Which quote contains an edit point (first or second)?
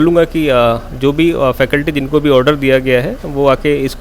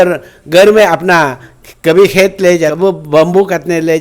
second